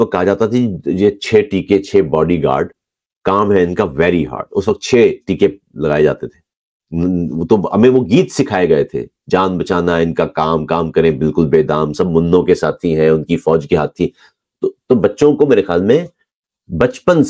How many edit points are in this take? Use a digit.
0